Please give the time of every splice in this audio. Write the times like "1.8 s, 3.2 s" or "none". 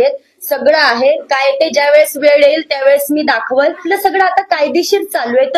3.8 s